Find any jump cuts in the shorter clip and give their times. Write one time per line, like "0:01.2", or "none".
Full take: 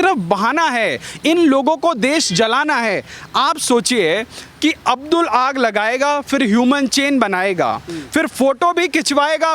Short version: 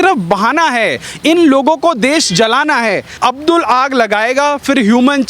0:03.1